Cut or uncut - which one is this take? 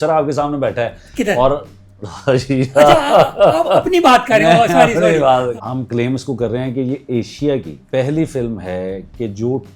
cut